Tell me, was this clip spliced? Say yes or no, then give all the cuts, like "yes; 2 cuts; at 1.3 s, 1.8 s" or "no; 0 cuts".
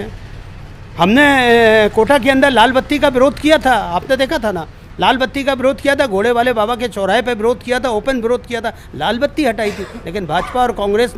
no; 0 cuts